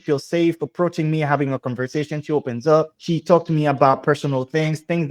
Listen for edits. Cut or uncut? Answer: uncut